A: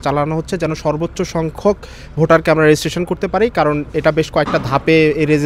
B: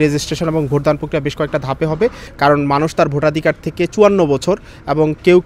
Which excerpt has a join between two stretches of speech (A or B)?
B